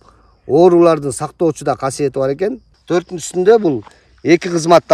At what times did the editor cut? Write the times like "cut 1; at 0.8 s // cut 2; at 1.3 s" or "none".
cut 1; at 2.7 s